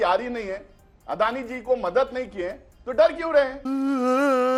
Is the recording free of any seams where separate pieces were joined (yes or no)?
yes